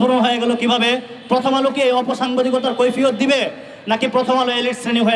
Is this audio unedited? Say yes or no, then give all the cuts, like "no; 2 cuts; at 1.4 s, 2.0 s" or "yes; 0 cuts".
yes; 0 cuts